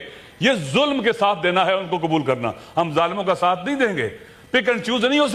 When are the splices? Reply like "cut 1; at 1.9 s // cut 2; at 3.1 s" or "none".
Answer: none